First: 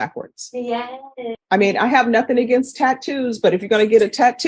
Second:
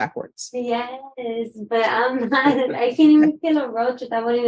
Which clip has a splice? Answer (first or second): first